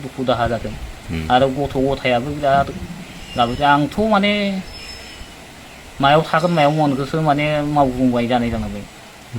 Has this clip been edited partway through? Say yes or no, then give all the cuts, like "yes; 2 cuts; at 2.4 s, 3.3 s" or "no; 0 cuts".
no; 0 cuts